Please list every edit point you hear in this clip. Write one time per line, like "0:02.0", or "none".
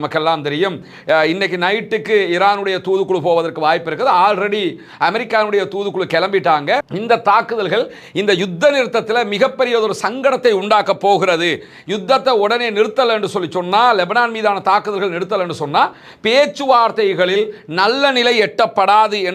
0:06.9